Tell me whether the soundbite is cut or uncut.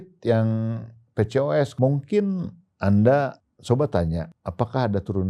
cut